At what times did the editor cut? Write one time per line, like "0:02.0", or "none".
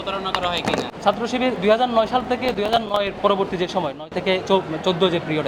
none